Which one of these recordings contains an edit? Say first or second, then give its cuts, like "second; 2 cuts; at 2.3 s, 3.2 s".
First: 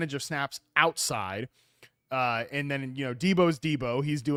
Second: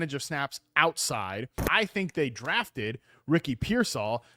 second; 1 cut; at 1.6 s